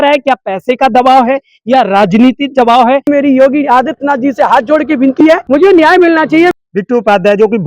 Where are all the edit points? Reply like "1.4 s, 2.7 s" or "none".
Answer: 3.1 s, 5.4 s, 6.5 s